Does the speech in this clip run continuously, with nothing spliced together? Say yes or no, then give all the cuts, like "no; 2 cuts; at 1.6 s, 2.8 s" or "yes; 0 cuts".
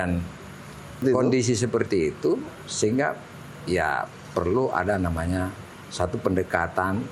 no; 1 cut; at 1.0 s